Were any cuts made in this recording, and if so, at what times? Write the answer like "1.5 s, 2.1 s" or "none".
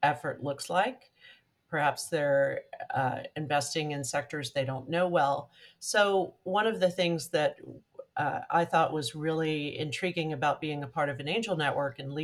none